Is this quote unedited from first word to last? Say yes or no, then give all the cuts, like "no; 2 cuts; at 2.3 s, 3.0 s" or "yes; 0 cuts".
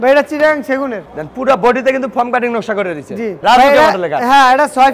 no; 2 cuts; at 1.0 s, 3.4 s